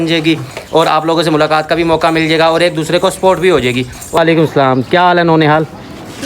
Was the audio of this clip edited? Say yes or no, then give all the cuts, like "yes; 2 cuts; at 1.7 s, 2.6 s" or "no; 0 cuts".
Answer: yes; 1 cut; at 4.2 s